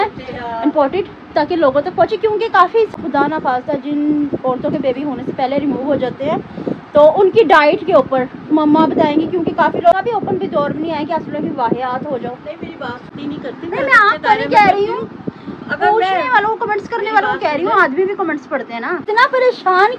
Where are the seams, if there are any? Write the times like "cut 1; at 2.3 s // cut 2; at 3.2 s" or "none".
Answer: cut 1; at 2.9 s // cut 2; at 9.9 s // cut 3; at 13.1 s // cut 4; at 19.0 s